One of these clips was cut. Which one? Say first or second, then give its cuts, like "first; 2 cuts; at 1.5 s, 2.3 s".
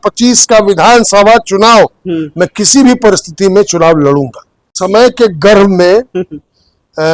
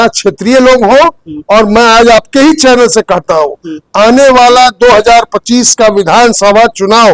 first; 1 cut; at 4.7 s